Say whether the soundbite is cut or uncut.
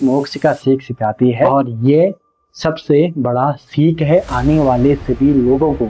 cut